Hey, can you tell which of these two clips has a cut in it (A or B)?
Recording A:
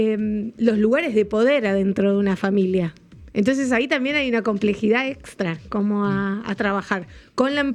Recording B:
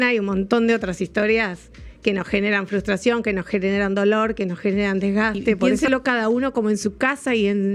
B